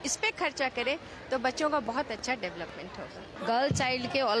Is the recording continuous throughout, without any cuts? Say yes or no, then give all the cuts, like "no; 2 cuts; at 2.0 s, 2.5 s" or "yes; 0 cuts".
no; 1 cut; at 3.3 s